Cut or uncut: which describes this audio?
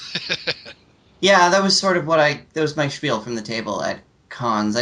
uncut